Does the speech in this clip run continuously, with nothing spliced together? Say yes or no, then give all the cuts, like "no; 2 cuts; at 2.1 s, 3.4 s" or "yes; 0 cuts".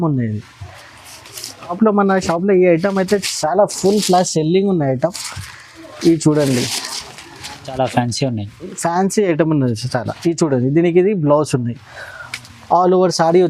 no; 2 cuts; at 1.7 s, 7.7 s